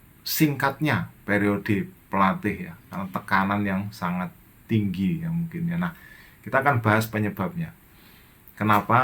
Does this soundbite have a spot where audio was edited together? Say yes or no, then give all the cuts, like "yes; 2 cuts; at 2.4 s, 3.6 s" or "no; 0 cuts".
no; 0 cuts